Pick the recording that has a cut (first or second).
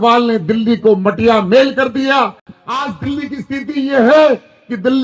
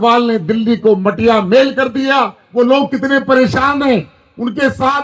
second